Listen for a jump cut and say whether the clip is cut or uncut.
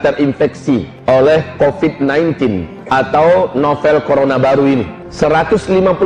cut